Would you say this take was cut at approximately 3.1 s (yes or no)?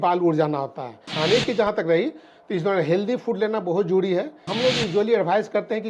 no